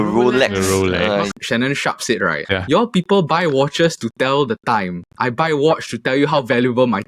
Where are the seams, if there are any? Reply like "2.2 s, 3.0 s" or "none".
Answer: 1.3 s, 2.4 s